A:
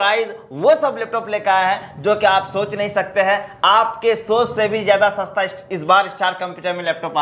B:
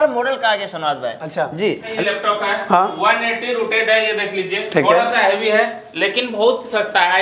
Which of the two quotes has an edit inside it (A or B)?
B